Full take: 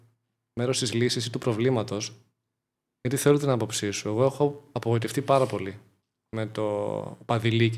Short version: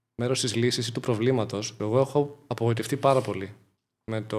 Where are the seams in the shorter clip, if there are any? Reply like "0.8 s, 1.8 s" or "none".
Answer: 1.7 s